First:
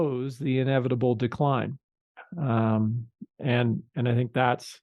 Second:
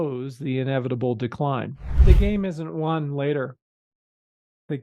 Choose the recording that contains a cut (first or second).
second